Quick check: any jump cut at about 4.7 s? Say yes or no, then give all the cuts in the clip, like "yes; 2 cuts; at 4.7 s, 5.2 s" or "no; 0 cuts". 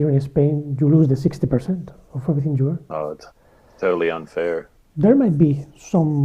yes; 1 cut; at 4.7 s